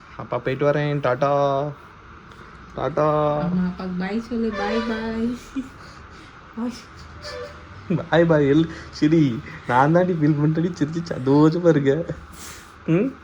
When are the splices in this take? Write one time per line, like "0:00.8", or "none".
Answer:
none

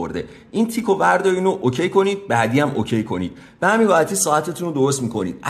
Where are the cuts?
0:02.2

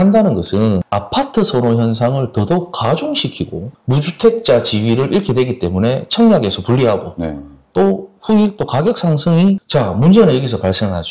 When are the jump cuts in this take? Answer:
0:03.7
0:09.6

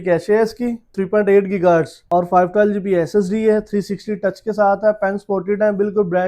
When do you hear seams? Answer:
0:00.9
0:02.0

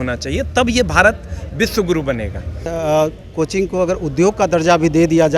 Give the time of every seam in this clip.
0:02.7

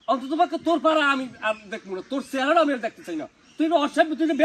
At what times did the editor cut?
none

